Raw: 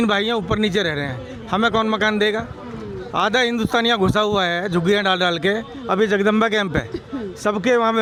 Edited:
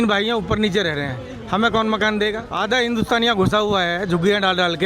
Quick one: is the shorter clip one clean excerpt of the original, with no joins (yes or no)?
no